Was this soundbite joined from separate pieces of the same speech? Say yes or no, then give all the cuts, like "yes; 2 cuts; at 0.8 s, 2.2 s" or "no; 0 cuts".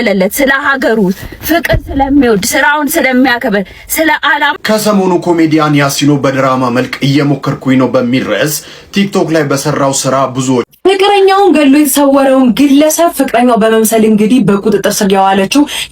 yes; 2 cuts; at 4.5 s, 10.7 s